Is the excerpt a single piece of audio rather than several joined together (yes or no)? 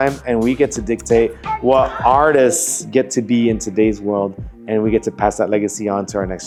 yes